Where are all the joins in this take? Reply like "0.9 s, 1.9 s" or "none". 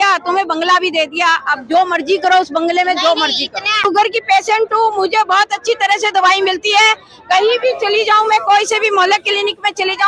3.8 s

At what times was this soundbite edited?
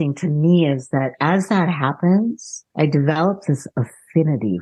none

